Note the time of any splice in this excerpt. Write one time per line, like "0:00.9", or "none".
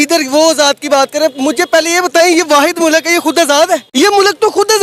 0:03.9

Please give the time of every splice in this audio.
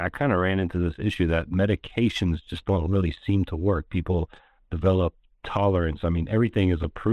none

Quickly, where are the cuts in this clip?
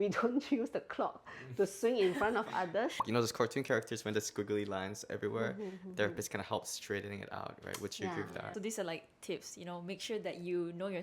0:03.0
0:08.5

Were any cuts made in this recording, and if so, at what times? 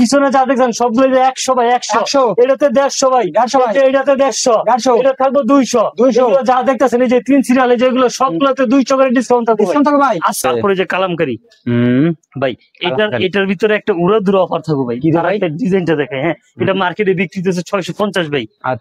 0:10.4

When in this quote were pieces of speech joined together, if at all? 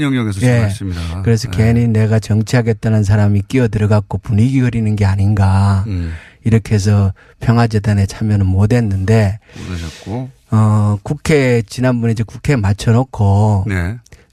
none

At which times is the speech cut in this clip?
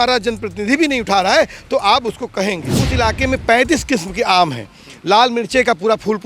0:02.7

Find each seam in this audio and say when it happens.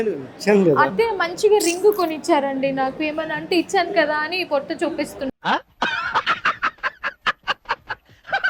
none

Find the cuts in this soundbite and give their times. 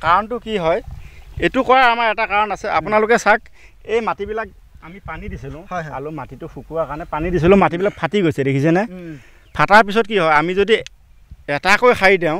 none

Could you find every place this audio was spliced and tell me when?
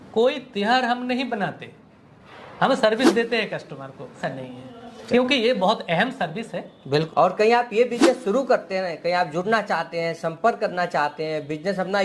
0:04.2
0:07.1

